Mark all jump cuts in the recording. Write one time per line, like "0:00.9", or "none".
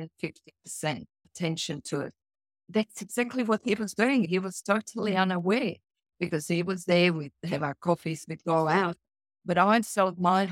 0:01.2
0:02.6
0:04.3